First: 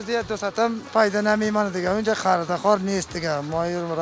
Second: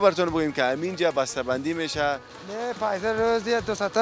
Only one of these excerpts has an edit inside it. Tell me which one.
second; 1 cut; at 2.4 s

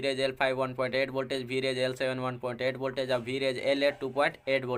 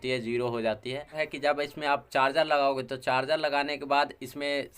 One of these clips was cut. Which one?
second; 1 cut; at 1.2 s

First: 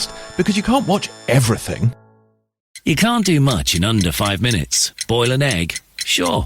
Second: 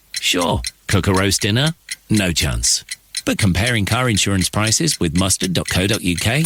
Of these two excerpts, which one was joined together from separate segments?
first; 1 cut; at 2.7 s

